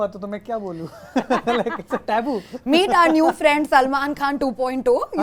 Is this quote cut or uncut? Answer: uncut